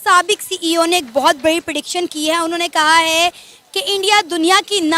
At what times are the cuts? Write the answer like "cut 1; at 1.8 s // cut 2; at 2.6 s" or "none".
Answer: none